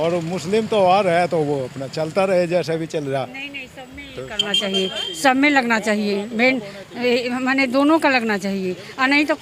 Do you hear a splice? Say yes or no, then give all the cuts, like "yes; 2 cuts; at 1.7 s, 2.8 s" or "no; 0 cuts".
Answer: no; 0 cuts